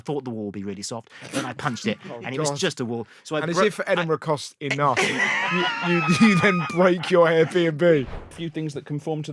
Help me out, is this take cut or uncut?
cut